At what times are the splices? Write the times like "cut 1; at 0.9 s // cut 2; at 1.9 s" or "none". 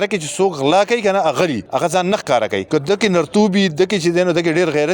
cut 1; at 1.6 s // cut 2; at 2.6 s